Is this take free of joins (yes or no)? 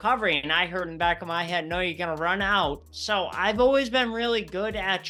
yes